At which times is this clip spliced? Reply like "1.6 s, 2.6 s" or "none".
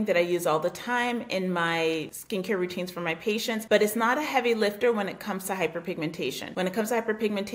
2.2 s, 3.6 s, 6.4 s